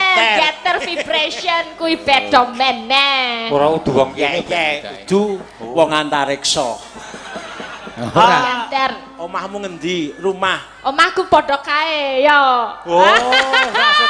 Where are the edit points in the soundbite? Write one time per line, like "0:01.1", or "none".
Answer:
none